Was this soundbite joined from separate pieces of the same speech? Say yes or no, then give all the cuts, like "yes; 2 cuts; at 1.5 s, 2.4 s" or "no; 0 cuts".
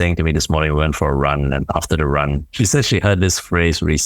yes; 1 cut; at 2.5 s